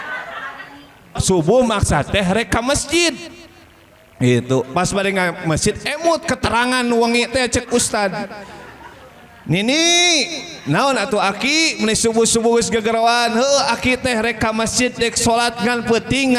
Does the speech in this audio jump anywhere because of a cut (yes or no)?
yes